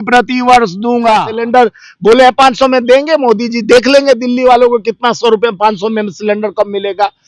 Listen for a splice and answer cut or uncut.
cut